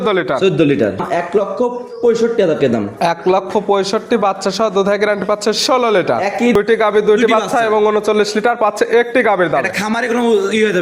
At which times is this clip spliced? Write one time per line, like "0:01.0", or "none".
0:01.0
0:06.6